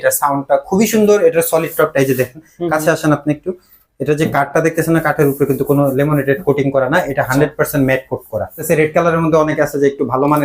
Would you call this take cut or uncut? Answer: cut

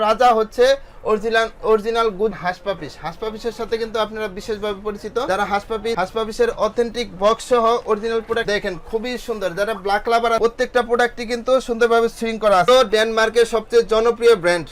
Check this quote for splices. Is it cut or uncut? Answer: cut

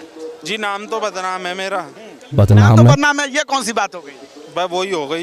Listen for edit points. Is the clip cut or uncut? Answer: uncut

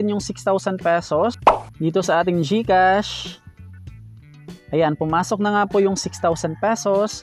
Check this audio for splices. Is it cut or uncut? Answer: cut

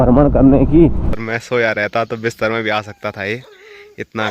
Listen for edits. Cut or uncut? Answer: cut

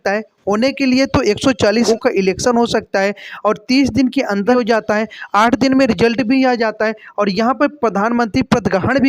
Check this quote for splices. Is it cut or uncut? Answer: cut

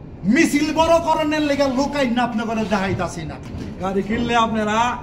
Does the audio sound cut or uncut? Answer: cut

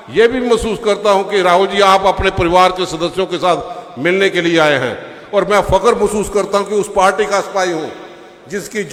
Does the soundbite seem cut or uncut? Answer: uncut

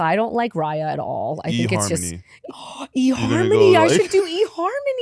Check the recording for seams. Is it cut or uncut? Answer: cut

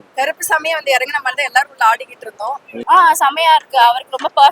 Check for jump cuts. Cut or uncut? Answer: cut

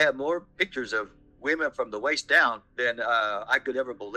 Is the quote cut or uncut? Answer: uncut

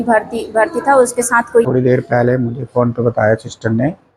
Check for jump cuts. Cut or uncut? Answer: cut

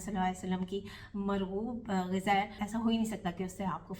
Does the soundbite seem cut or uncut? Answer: cut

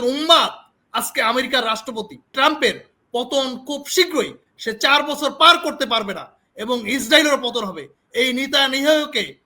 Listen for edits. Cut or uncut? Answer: cut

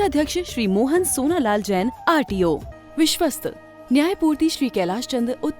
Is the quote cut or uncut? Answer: cut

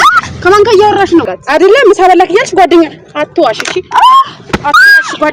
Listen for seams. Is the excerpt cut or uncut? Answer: cut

